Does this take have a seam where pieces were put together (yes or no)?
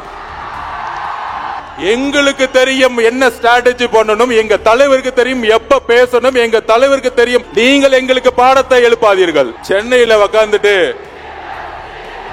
yes